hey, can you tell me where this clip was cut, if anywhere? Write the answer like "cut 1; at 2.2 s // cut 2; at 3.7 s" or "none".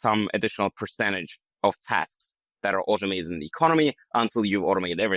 none